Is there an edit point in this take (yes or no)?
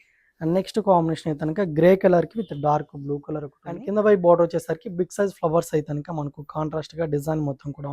yes